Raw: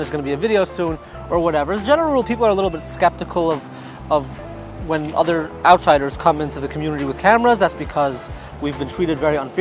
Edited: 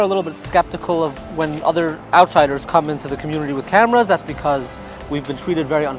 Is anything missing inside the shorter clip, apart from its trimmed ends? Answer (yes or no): yes